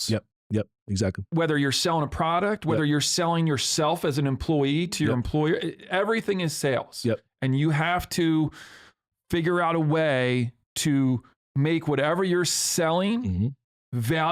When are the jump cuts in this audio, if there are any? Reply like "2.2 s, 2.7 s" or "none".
1.2 s